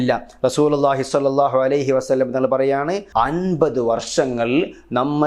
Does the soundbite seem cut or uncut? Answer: cut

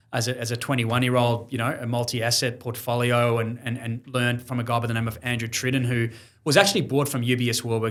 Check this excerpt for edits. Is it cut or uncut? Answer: uncut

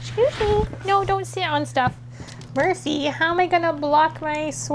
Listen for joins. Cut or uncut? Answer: cut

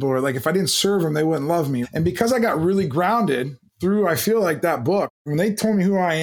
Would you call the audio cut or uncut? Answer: cut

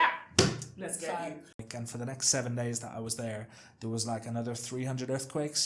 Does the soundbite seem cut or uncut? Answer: cut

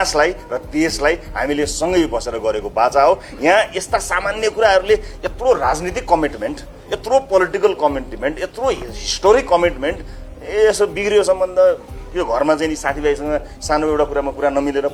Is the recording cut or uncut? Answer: uncut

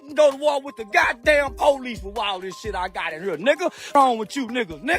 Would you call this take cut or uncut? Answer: cut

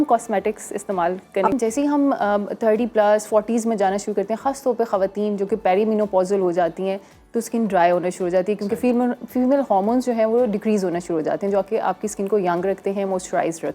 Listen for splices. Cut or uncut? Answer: cut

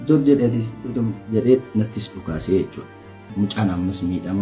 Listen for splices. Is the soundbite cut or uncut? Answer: cut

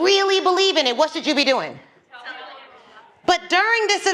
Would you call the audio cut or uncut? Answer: uncut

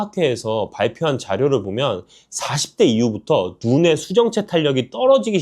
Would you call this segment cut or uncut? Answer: uncut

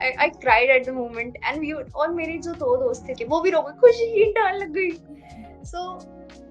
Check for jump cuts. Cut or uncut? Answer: cut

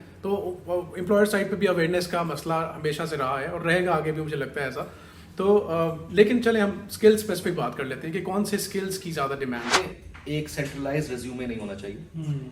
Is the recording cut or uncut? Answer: cut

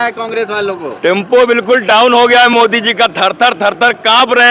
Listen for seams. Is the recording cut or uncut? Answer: uncut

